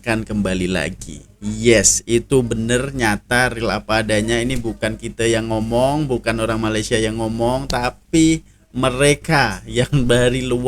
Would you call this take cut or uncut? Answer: uncut